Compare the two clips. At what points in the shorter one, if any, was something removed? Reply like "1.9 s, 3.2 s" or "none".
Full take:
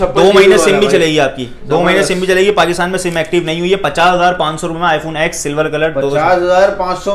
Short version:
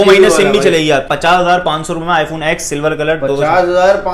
1.1 s